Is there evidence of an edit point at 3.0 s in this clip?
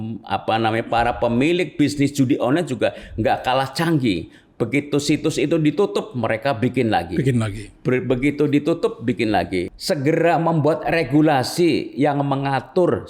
no; 1 cut; at 9.7 s

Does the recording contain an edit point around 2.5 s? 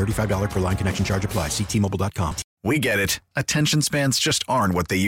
yes; 1 cut; at 2.5 s

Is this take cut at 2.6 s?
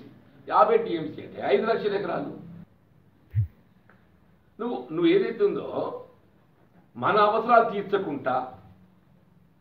yes; 1 cut; at 2.6 s

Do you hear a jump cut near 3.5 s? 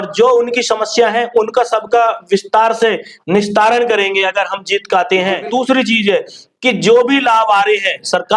no; 1 cut; at 5.4 s

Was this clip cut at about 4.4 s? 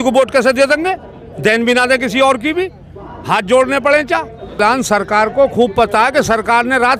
yes; 1 cut; at 4.4 s

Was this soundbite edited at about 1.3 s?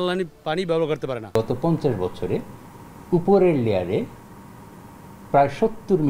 yes; 1 cut; at 1.3 s

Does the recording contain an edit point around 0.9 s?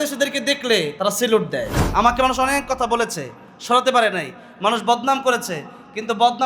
yes; 2 cuts; at 0.9 s, 1.8 s

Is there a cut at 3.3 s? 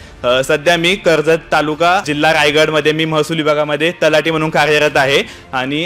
no; 1 cut; at 2.1 s

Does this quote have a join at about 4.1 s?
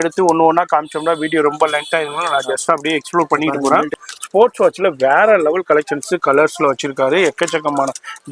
yes; 1 cut; at 4.1 s

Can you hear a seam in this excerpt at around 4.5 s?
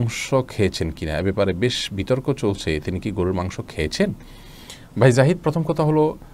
no; 0 cuts

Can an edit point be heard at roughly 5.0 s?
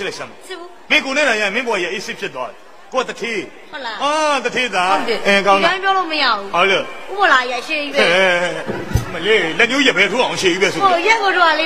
yes; 1 cut; at 5.0 s

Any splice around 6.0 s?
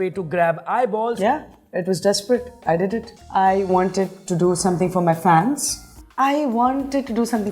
no; 2 cuts; at 1.2 s, 3.2 s

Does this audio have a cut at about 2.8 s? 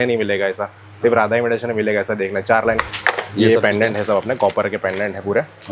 yes; 1 cut; at 2.8 s

